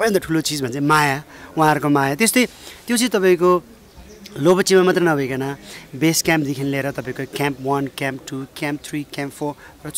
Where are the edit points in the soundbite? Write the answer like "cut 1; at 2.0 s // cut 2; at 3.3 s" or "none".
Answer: none